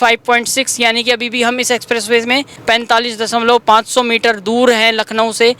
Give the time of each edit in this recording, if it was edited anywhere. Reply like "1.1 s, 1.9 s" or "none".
none